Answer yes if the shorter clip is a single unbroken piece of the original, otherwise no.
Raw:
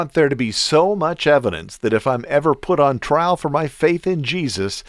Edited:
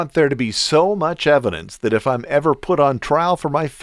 yes